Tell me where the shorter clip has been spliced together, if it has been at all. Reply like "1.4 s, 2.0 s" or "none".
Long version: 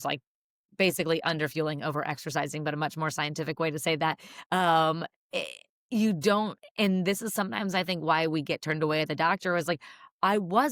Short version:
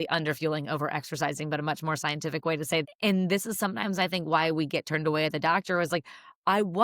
2.8 s